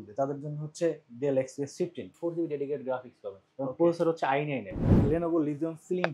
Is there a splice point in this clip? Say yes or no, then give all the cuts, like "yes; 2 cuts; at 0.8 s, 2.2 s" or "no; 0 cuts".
yes; 2 cuts; at 2.1 s, 4.9 s